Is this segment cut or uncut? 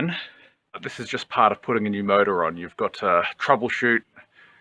cut